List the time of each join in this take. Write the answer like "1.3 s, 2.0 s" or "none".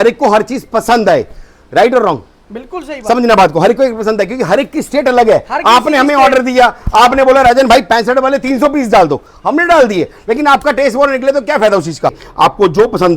12.2 s